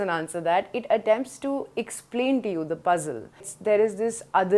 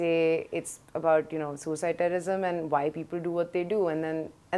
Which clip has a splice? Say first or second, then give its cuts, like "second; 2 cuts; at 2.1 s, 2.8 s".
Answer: first; 1 cut; at 3.5 s